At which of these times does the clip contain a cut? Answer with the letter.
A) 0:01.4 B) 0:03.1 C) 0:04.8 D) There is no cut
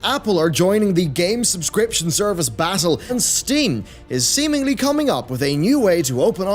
B